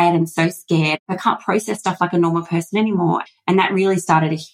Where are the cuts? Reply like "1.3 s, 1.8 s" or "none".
1.0 s, 3.2 s